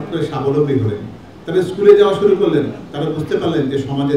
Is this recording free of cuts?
yes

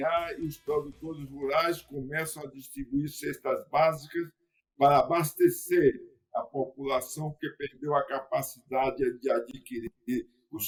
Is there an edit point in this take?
no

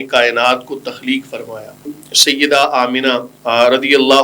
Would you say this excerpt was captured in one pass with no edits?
no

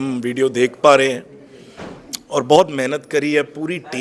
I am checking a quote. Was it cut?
no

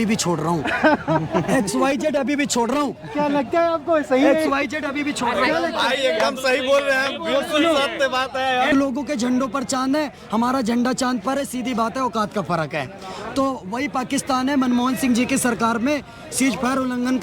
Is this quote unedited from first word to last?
no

